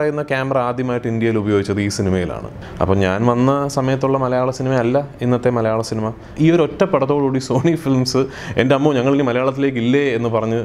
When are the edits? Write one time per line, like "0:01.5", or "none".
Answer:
0:02.5
0:06.2